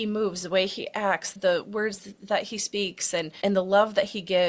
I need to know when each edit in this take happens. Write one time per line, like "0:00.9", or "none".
0:01.3
0:03.3

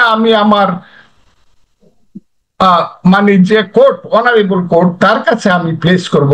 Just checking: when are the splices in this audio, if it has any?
none

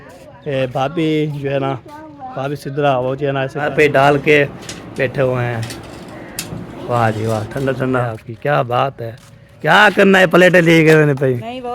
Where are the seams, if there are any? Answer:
0:03.7
0:08.2

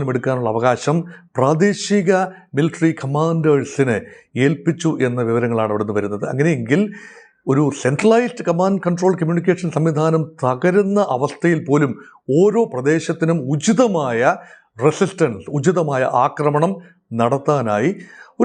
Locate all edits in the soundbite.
none

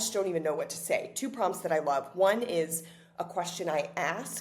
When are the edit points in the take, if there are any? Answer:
none

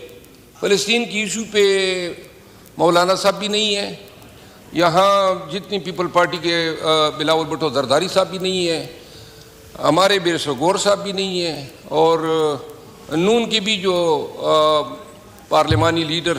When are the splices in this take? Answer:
none

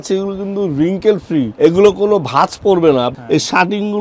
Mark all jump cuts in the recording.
0:01.5
0:03.1

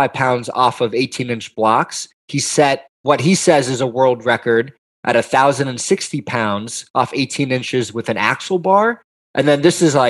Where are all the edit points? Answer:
0:02.8

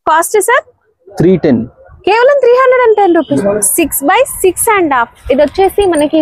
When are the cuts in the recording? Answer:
0:03.3

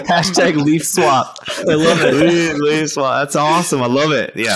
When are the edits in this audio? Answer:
none

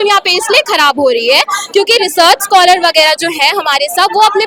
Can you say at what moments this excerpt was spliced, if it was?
none

